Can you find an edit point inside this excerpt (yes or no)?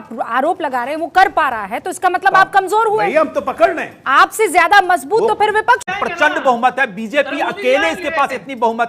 yes